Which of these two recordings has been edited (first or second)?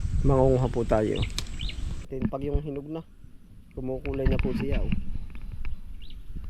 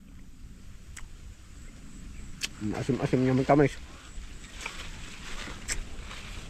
first